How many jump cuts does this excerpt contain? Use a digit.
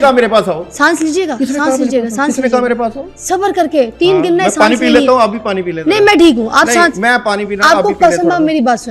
0